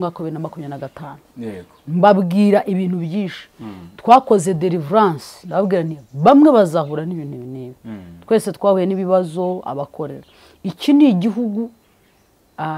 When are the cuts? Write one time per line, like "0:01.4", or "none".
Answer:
none